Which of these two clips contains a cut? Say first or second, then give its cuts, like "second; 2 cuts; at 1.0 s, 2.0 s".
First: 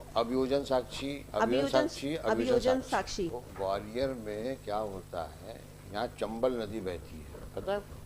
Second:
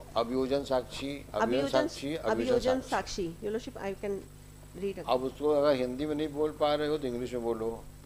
first; 1 cut; at 2.9 s